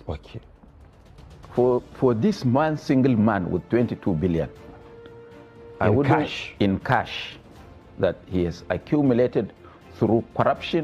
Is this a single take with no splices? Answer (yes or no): yes